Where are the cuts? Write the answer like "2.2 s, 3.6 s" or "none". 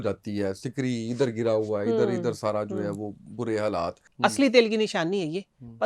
4.0 s